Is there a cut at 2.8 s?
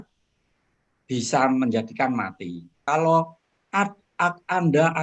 yes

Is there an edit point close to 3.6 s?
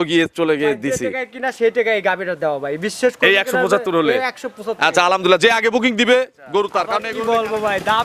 no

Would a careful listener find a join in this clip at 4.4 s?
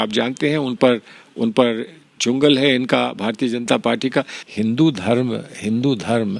yes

